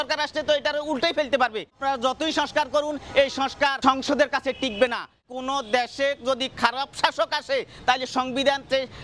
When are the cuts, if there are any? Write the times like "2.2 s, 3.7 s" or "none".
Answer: 1.8 s, 3.8 s, 5.2 s